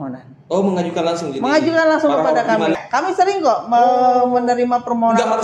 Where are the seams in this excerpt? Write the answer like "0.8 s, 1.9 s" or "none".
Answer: 2.8 s